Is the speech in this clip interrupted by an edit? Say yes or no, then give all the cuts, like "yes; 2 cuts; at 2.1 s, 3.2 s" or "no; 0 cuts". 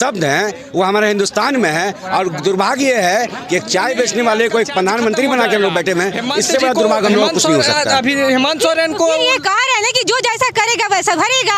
yes; 1 cut; at 7.7 s